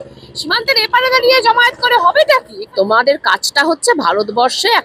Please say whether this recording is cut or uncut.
cut